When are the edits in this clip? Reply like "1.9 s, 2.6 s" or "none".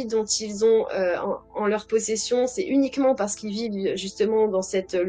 none